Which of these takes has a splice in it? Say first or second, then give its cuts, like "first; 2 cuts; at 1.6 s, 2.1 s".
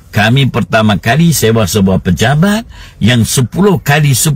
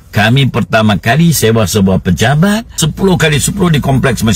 second; 1 cut; at 2.8 s